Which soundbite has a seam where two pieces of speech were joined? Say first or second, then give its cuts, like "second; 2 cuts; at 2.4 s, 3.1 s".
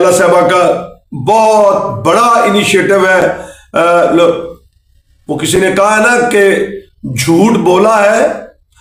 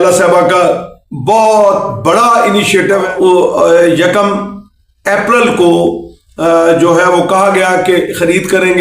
second; 1 cut; at 3.1 s